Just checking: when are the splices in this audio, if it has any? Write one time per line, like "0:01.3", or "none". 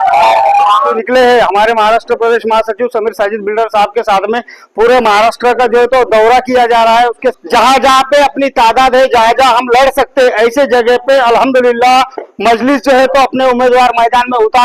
0:01.0
0:07.3